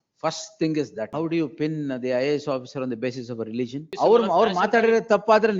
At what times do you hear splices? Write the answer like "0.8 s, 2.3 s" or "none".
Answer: 1.1 s, 3.9 s